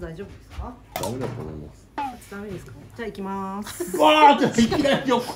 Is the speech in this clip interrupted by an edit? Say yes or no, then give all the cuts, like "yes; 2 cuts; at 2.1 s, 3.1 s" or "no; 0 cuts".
yes; 1 cut; at 0.9 s